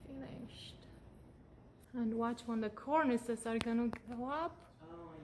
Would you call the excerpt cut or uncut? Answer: cut